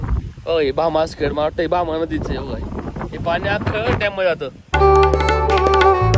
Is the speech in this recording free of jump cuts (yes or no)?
no